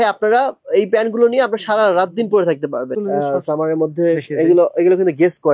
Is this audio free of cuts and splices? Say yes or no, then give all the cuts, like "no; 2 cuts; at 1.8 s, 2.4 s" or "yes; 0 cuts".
no; 1 cut; at 2.9 s